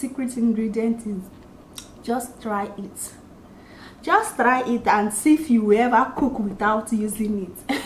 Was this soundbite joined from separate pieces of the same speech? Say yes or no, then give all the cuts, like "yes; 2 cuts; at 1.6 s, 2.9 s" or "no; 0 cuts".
yes; 1 cut; at 1.3 s